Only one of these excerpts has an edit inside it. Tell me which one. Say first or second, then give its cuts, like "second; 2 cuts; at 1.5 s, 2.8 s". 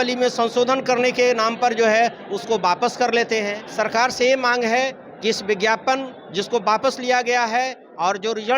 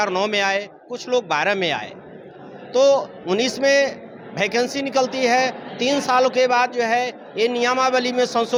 first; 1 cut; at 3.6 s